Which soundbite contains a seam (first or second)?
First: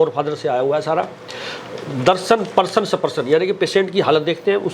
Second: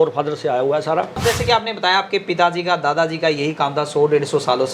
second